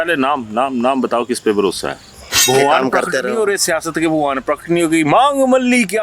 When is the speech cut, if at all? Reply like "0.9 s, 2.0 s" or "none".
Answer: 2.4 s